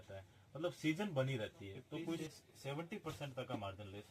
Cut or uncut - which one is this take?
cut